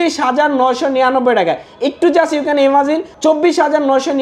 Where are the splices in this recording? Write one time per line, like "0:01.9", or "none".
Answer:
0:03.1